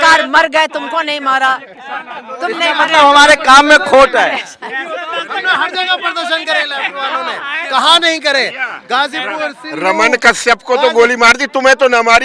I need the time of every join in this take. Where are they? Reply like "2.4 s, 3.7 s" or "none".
none